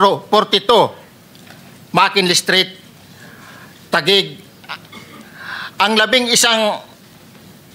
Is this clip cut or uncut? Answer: uncut